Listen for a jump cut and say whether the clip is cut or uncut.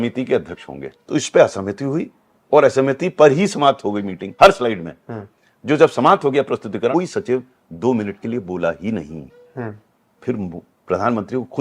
cut